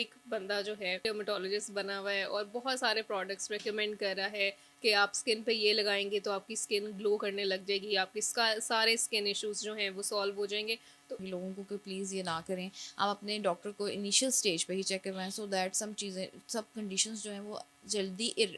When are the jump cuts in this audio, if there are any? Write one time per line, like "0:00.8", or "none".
0:01.0
0:11.2